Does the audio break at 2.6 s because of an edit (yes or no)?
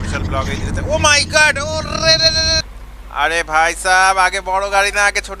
yes